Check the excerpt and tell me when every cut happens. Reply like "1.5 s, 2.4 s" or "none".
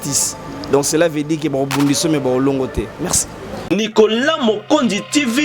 3.7 s